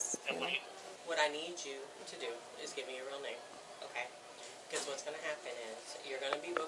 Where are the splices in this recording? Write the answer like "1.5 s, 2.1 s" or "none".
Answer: 1.0 s